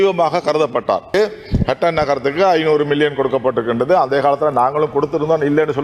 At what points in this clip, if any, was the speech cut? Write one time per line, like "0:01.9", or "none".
0:01.1